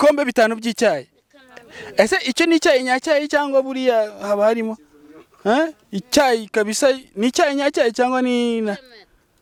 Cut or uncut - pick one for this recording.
uncut